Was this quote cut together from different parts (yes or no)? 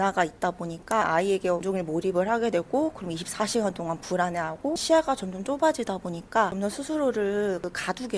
yes